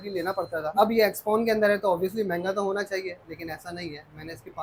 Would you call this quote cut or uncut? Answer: uncut